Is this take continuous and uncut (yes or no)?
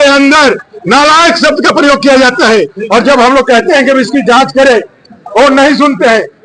yes